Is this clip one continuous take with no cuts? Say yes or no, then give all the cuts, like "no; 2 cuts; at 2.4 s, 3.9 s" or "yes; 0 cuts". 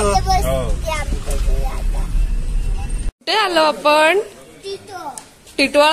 no; 1 cut; at 3.2 s